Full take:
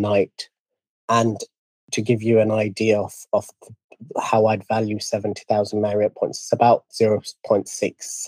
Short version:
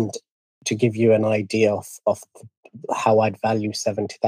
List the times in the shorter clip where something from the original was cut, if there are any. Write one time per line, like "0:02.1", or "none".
none